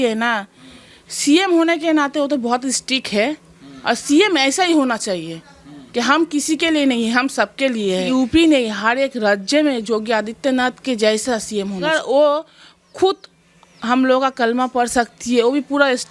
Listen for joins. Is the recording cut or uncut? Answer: cut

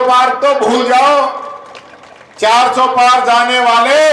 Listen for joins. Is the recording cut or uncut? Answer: uncut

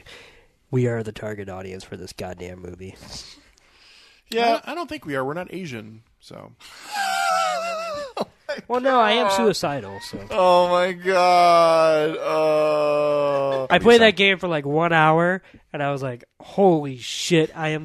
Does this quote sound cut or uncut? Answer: cut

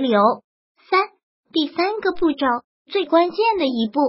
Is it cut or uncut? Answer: cut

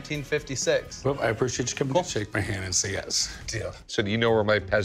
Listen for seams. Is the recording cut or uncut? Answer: cut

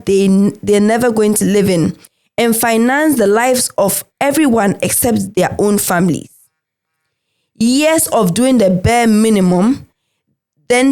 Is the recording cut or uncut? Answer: uncut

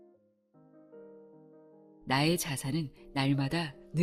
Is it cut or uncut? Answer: cut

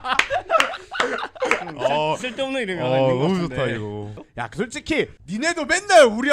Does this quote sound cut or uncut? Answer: cut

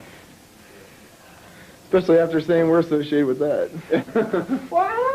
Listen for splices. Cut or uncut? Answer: cut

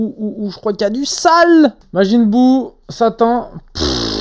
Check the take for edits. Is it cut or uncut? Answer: cut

